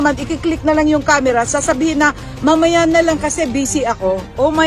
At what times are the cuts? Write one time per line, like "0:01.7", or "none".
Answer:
none

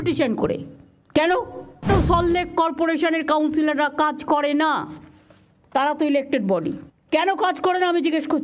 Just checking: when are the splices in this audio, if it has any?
0:01.9
0:06.9

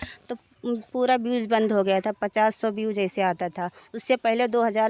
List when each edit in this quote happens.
none

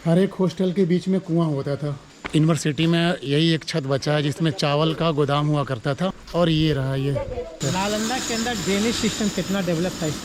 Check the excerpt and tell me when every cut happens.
0:02.1
0:06.2
0:07.6

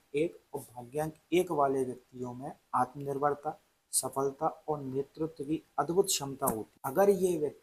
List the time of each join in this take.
none

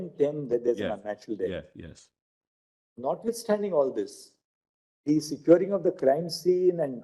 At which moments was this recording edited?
none

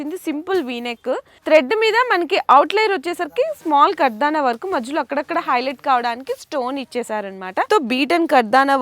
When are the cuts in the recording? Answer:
0:01.3
0:07.7

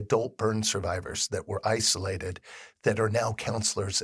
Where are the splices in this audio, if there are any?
none

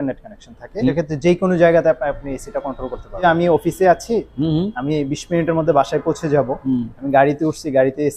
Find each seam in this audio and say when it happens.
0:00.9
0:03.2

